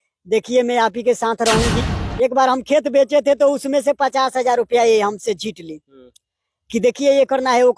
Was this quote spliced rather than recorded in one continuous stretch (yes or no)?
yes